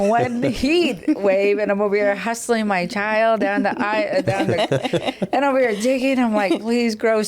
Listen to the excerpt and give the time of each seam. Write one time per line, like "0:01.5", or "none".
none